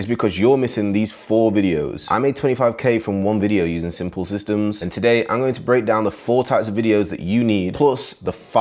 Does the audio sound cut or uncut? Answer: cut